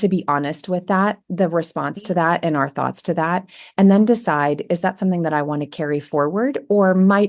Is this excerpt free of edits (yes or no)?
yes